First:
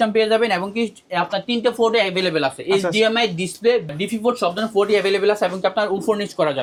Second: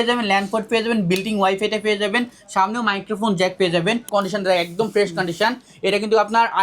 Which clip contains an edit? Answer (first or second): second